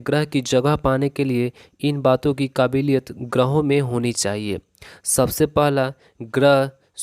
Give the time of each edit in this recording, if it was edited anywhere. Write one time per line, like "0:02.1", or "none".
none